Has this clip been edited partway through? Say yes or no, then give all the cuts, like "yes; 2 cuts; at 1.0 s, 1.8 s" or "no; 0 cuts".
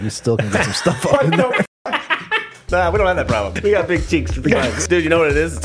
yes; 3 cuts; at 2.6 s, 3.6 s, 4.8 s